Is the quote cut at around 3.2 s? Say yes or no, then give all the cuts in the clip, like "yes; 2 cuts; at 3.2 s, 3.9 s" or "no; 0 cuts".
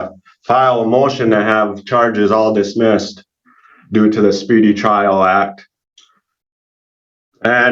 no; 0 cuts